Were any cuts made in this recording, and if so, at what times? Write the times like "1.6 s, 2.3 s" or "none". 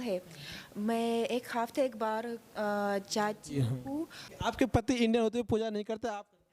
4.2 s